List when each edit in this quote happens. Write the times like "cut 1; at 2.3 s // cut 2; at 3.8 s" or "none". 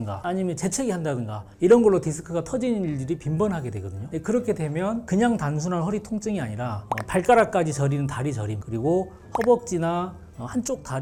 none

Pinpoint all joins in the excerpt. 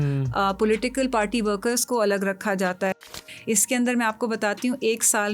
cut 1; at 3.0 s

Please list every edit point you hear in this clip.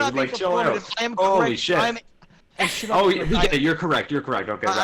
none

